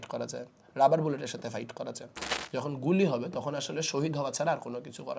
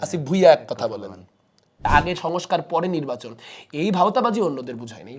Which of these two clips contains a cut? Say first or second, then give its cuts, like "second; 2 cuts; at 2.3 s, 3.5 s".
second; 1 cut; at 1.9 s